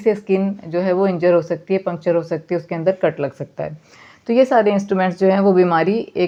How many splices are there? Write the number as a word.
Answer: zero